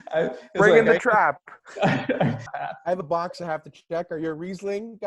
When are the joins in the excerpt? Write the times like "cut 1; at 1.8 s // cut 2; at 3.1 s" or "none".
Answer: cut 1; at 2.5 s